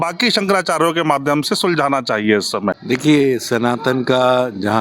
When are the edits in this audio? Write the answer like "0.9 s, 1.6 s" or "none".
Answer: 2.8 s